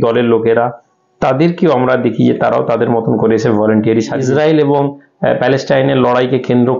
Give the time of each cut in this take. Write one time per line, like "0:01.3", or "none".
0:04.2